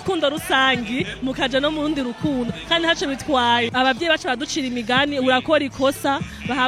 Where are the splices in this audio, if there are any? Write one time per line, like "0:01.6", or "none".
0:03.7